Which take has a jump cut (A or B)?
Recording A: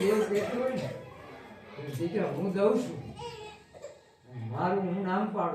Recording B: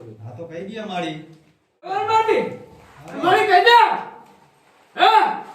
B